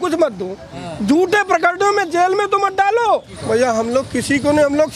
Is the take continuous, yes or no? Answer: no